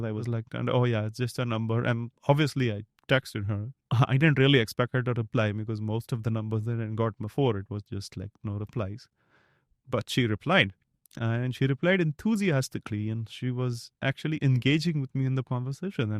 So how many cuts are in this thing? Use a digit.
0